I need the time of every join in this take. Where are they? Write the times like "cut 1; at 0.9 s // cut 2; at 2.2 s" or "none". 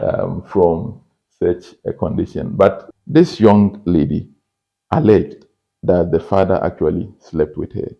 cut 1; at 2.8 s